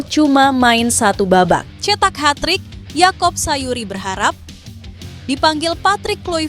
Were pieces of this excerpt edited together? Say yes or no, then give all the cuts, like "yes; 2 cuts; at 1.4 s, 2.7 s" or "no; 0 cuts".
yes; 1 cut; at 1.7 s